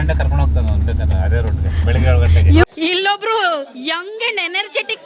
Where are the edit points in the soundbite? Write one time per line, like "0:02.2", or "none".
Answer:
0:02.6